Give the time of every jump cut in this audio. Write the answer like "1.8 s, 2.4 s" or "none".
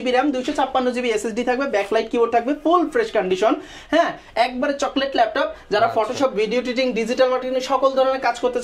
none